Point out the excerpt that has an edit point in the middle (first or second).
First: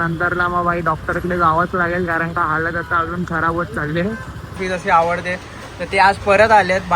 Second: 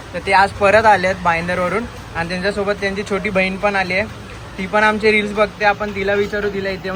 first